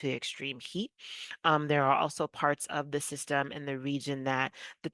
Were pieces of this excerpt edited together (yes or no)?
no